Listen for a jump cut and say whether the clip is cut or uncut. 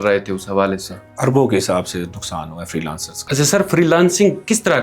cut